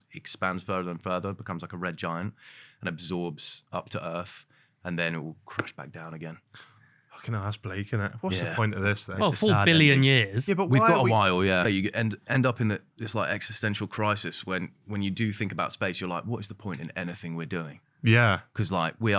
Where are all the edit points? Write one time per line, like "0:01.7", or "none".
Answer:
0:11.6